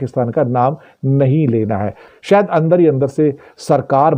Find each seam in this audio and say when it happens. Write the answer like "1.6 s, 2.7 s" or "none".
2.2 s